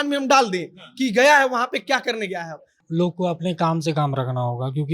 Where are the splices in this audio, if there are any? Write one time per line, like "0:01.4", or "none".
0:02.8